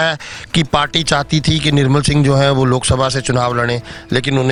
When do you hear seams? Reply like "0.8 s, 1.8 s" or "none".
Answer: none